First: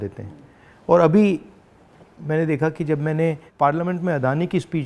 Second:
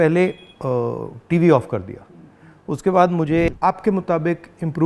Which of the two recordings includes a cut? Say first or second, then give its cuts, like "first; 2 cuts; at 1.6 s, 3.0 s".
second; 1 cut; at 3.5 s